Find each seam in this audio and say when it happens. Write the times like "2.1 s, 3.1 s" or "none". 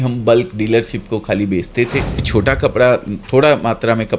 2.3 s